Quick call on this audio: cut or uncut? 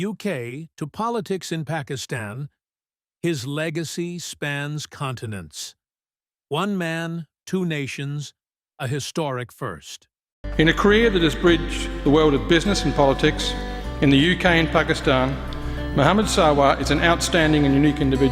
uncut